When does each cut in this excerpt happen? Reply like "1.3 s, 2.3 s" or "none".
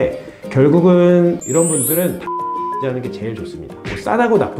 1.4 s